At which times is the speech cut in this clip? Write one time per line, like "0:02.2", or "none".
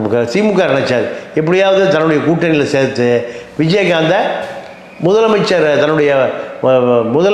none